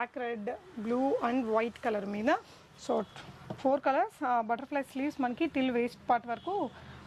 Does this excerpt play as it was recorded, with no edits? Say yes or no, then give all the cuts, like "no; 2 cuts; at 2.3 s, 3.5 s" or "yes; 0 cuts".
yes; 0 cuts